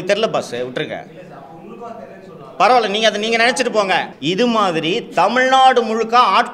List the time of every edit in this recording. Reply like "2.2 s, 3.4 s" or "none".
4.1 s